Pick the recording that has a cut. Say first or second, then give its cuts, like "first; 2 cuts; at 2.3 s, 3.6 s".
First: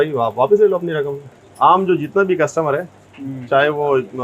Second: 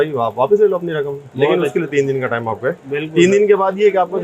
first; 1 cut; at 1.2 s